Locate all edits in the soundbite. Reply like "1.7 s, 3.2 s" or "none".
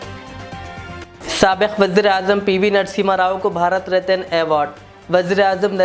1.0 s